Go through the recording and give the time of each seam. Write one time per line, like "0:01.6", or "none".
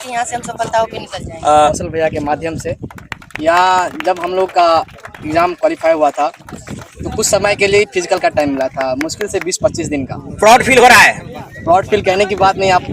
0:01.7